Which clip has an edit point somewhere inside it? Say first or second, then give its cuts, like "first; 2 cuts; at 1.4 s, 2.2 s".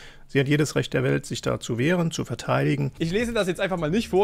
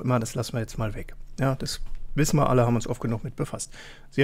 first; 1 cut; at 3.0 s